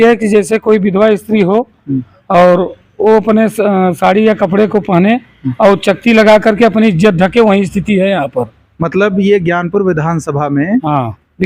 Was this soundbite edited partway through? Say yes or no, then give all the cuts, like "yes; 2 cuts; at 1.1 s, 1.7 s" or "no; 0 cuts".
no; 0 cuts